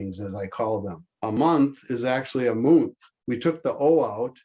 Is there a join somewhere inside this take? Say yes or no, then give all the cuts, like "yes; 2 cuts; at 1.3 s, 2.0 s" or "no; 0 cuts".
yes; 1 cut; at 1.3 s